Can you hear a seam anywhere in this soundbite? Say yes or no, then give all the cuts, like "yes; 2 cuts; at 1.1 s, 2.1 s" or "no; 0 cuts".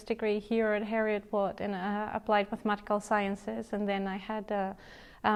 no; 0 cuts